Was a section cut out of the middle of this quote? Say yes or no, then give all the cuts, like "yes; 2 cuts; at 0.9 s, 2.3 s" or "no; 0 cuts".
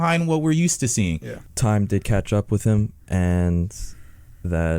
yes; 1 cut; at 1.4 s